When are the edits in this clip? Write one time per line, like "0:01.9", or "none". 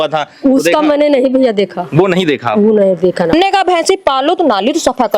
0:03.3